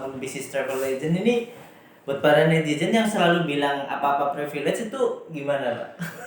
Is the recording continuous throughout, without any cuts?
yes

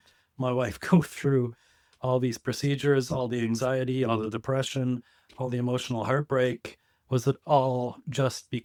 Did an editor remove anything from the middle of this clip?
no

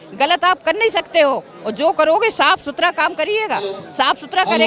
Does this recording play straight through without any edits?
yes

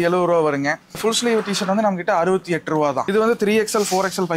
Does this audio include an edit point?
yes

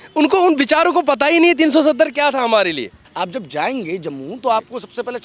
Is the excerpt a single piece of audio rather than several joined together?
no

